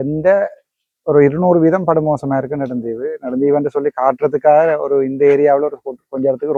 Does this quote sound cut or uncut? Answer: uncut